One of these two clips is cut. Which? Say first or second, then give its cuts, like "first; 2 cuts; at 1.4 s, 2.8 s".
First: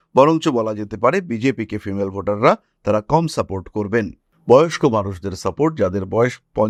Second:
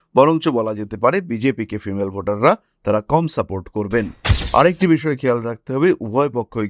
second; 1 cut; at 4.3 s